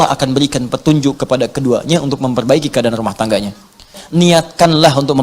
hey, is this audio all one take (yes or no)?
no